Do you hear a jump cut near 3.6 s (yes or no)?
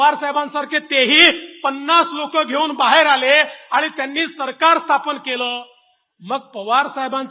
no